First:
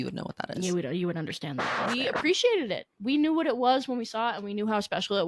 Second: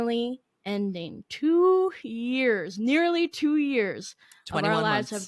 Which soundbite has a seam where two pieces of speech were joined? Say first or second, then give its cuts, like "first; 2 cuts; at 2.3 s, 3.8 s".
first; 1 cut; at 1.8 s